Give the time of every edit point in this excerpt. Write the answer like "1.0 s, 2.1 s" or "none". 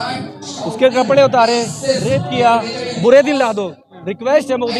2.9 s